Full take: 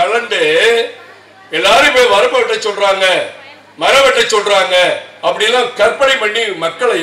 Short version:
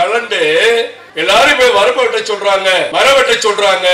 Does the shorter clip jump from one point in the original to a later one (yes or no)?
yes